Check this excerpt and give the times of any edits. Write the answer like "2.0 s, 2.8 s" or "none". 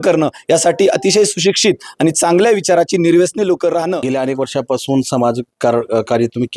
4.1 s